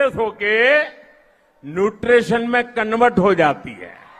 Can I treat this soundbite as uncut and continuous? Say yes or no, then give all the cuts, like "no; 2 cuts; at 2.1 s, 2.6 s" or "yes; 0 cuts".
yes; 0 cuts